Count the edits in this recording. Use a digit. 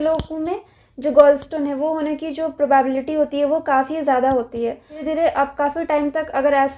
1